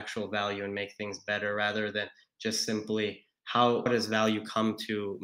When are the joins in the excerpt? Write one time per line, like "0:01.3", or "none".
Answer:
0:03.9